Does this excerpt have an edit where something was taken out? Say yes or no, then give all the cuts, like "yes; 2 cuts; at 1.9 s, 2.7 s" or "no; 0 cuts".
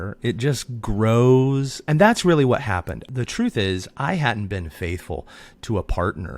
yes; 2 cuts; at 1.7 s, 3.0 s